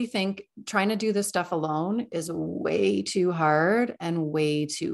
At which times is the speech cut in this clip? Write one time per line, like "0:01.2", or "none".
none